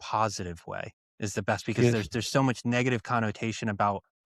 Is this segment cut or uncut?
cut